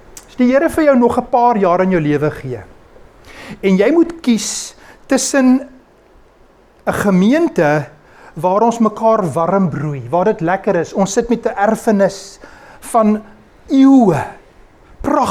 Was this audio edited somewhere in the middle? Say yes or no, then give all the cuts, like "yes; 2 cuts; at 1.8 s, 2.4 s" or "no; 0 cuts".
no; 0 cuts